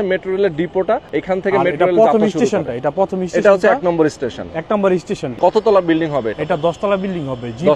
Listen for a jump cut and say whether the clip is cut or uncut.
cut